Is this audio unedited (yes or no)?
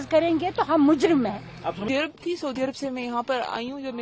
no